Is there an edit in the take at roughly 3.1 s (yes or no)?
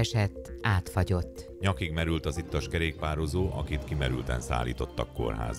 no